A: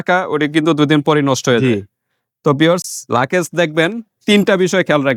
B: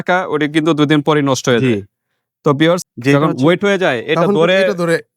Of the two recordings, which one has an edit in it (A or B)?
B